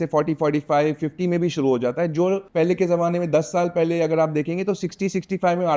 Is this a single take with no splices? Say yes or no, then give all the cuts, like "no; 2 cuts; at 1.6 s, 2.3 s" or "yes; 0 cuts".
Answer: no; 1 cut; at 2.5 s